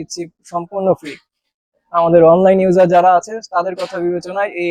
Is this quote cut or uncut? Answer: uncut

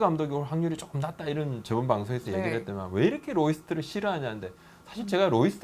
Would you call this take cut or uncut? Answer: uncut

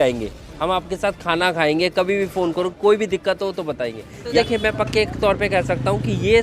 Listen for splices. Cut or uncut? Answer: cut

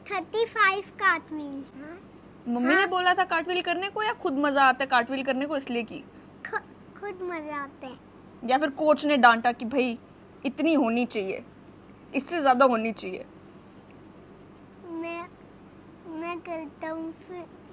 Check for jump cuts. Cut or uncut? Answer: uncut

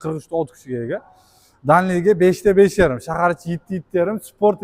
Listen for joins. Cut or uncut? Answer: uncut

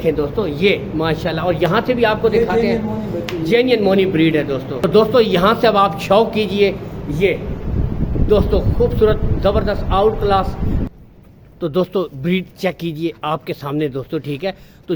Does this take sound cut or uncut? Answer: cut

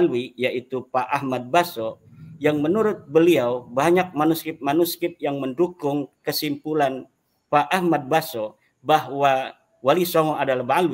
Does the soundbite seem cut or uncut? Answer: uncut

